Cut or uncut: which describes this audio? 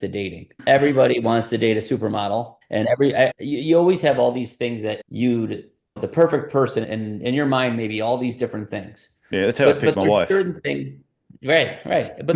uncut